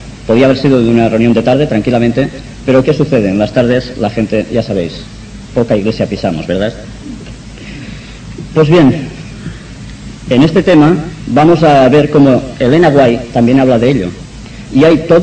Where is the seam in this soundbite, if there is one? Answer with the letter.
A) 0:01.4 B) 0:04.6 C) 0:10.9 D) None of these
A